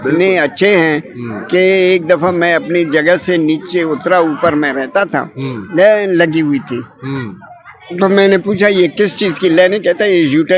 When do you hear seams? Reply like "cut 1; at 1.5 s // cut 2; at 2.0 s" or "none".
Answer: none

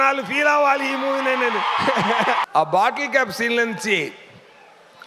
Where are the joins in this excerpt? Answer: cut 1; at 2.5 s

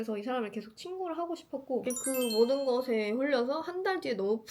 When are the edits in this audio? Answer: cut 1; at 1.9 s

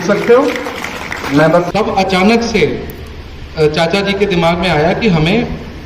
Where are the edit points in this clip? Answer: cut 1; at 1.7 s

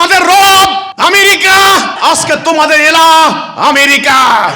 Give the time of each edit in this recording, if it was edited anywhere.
cut 1; at 0.9 s // cut 2; at 1.9 s

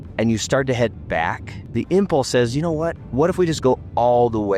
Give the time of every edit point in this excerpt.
none

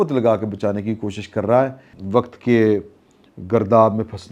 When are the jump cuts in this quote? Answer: cut 1; at 1.9 s

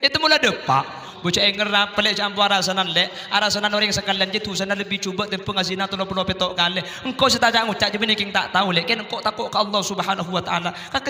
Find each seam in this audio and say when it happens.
cut 1; at 1.1 s

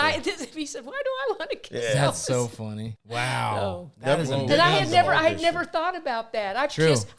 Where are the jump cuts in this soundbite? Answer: cut 1; at 2.9 s

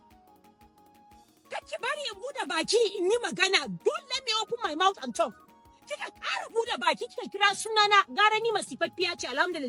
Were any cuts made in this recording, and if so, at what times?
none

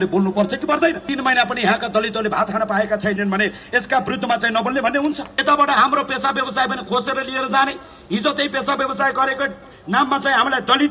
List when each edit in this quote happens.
cut 1; at 1.0 s // cut 2; at 5.3 s

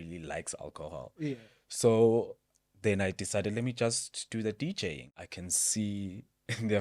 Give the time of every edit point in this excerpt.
cut 1; at 5.1 s

